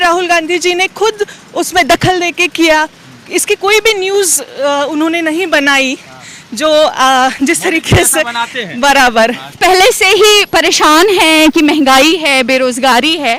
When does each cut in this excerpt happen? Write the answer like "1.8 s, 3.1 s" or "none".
9.5 s